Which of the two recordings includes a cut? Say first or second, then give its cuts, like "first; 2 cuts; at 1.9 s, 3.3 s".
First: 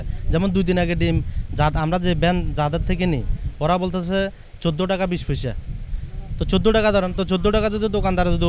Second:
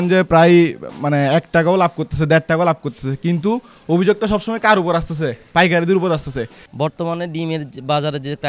second; 1 cut; at 6.6 s